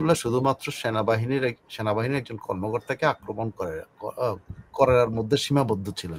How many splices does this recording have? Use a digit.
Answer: 0